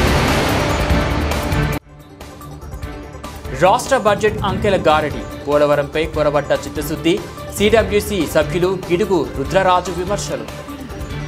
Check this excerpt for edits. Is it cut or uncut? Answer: uncut